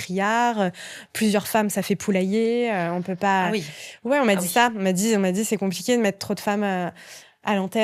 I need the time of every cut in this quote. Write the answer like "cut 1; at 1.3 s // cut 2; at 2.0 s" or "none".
none